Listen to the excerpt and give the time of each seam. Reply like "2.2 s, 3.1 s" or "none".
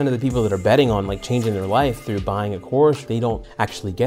3.2 s